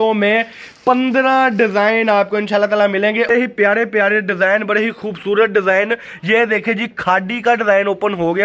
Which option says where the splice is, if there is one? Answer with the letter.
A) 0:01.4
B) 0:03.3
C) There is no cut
B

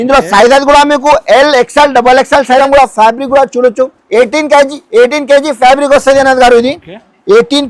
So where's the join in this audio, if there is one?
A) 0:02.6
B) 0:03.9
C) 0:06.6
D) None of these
A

